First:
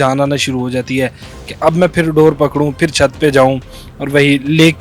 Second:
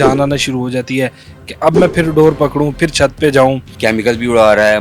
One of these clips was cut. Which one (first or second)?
second